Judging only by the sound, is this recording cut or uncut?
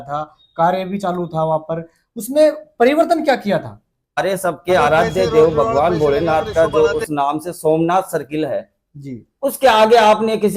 cut